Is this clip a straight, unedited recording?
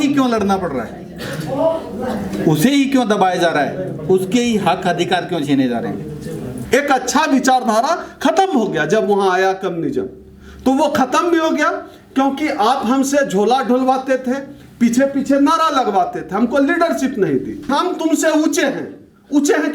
no; 2 cuts; at 6.5 s, 17.7 s

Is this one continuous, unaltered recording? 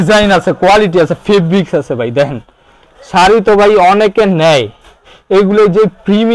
yes; 0 cuts

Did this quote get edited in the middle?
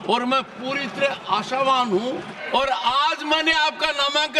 yes; 1 cut; at 2.4 s

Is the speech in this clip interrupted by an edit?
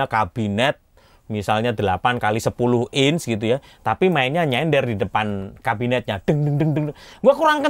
no; 0 cuts

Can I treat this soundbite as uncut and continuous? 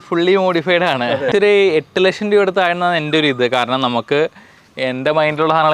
no; 1 cut; at 1.3 s

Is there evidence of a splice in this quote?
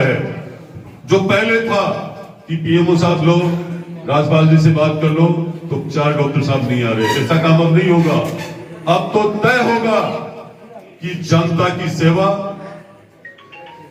no; 0 cuts

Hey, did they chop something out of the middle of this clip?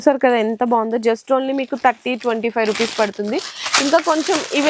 no; 0 cuts

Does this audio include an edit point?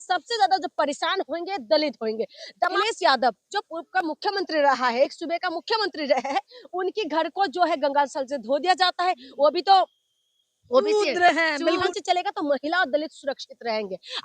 yes; 2 cuts; at 2.8 s, 11.9 s

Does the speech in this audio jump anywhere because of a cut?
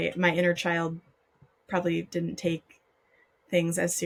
no; 0 cuts

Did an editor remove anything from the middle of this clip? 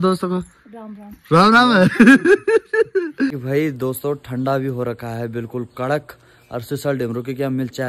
yes; 1 cut; at 3.4 s

